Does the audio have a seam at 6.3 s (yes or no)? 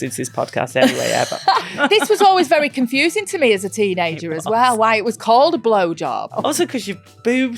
yes